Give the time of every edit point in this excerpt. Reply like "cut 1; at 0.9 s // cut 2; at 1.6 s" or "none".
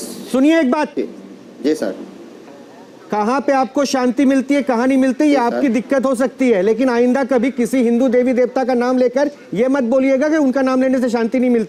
none

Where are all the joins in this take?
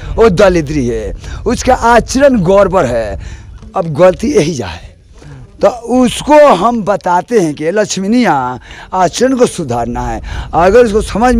none

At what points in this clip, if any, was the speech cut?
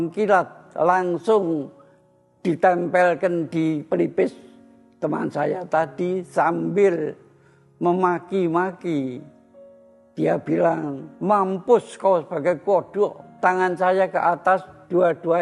cut 1; at 13.3 s

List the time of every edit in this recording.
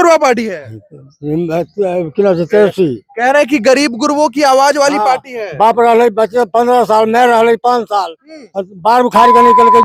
none

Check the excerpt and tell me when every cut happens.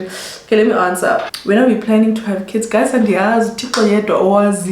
cut 1; at 1.3 s

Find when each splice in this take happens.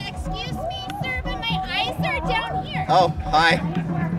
none

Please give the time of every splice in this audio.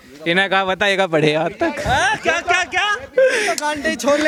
none

